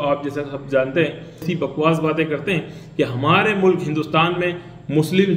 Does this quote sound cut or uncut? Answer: cut